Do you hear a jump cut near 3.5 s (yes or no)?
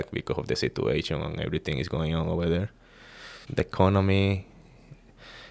yes